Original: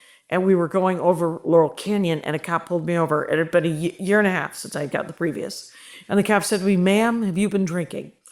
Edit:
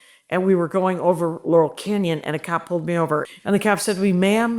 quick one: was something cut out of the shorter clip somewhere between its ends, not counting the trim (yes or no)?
yes